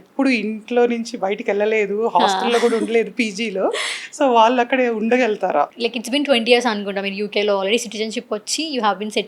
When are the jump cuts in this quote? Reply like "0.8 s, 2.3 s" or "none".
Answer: 5.7 s